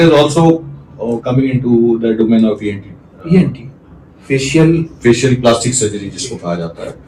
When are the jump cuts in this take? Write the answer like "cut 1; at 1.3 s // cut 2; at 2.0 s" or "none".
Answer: none